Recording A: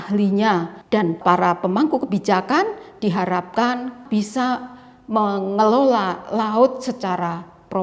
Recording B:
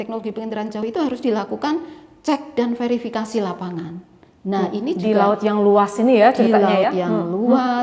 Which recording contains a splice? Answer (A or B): A